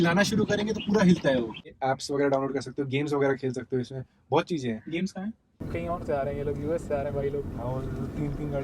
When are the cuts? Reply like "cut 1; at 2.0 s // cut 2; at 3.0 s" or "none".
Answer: cut 1; at 1.6 s // cut 2; at 5.6 s